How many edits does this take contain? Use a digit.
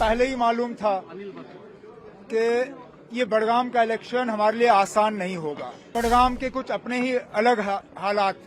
1